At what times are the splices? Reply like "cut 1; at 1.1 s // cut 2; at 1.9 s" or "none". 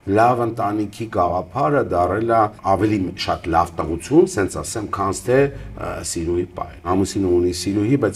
cut 1; at 2.6 s // cut 2; at 6.9 s